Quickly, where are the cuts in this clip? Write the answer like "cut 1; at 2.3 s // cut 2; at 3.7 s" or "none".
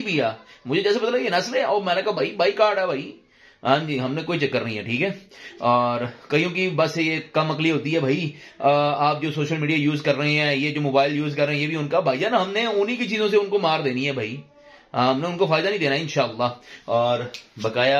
none